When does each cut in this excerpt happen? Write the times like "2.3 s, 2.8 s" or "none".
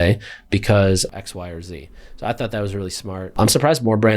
1.1 s, 3.3 s